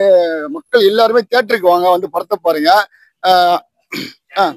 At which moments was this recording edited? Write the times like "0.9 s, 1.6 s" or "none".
none